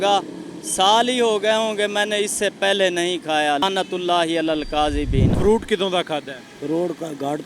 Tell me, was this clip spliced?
yes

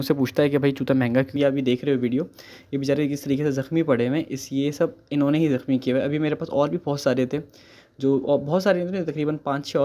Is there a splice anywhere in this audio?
yes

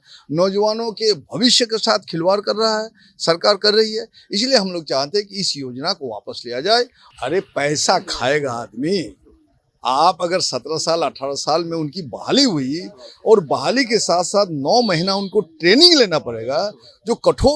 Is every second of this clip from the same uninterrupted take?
no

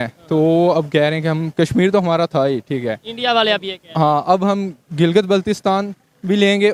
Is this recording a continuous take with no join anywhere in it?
yes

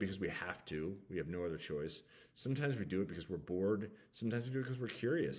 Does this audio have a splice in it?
no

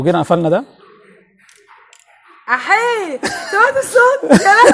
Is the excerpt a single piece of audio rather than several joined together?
yes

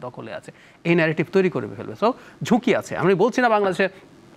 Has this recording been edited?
no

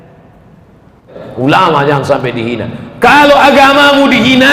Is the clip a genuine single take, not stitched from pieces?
no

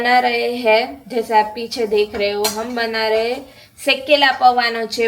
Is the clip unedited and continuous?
yes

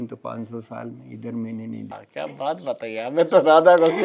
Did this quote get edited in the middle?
yes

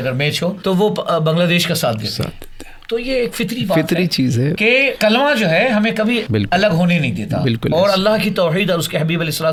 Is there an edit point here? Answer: no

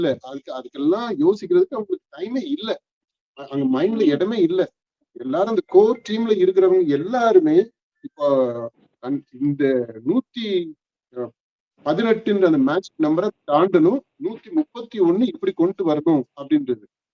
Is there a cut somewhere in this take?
no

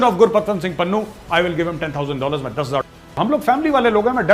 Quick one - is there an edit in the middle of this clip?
yes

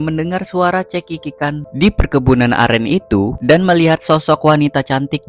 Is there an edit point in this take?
yes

